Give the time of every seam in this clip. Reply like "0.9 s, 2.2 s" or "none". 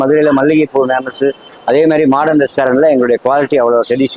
none